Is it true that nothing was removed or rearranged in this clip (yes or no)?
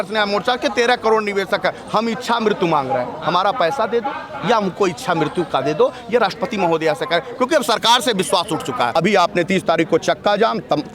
no